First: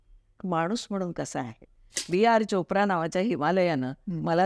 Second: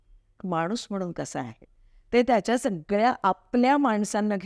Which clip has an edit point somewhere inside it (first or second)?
first